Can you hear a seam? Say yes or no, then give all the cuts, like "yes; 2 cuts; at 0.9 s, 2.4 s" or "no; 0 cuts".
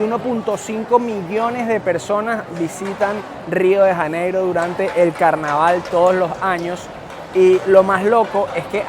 no; 0 cuts